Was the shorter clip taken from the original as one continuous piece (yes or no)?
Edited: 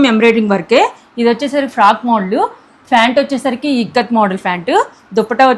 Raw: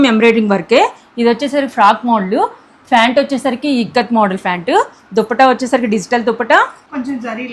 yes